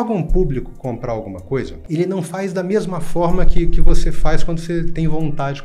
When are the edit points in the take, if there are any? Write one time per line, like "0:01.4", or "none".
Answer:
0:01.8